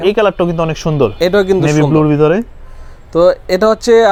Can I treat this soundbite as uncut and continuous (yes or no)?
yes